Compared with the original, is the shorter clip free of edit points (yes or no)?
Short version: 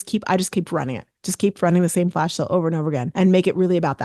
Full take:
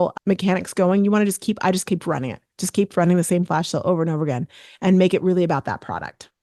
no